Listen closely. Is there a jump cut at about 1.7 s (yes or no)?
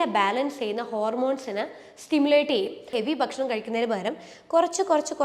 no